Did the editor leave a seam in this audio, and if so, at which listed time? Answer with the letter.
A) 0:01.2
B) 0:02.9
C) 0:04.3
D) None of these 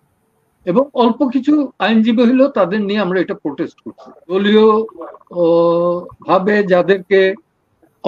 C